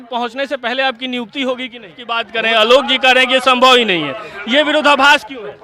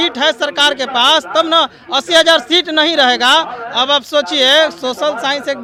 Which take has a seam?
first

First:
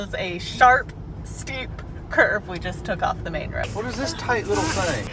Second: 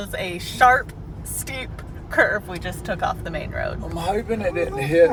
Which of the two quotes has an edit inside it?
first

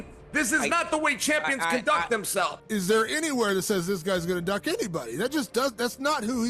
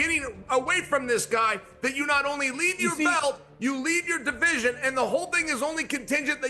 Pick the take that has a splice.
first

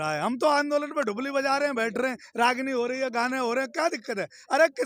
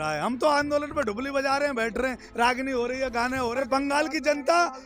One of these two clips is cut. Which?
second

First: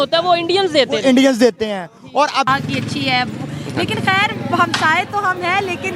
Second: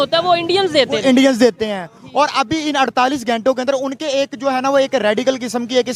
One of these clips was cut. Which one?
first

